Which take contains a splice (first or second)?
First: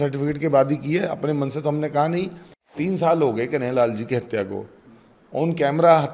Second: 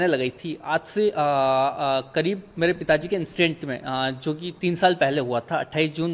first